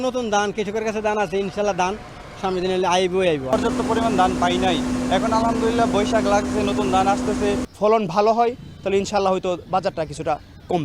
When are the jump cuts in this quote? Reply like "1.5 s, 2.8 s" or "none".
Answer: 3.5 s, 7.7 s